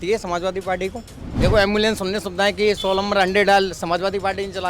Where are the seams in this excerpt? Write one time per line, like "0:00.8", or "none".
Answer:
0:01.2